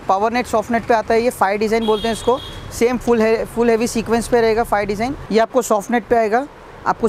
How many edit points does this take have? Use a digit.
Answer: 1